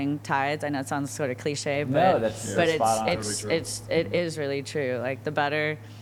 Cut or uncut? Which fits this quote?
uncut